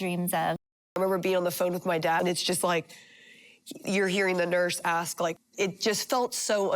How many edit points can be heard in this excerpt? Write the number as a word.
three